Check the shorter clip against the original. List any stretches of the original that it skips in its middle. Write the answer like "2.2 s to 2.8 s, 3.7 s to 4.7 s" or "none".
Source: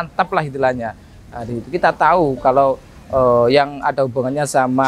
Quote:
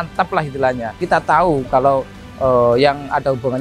1.0 s to 1.7 s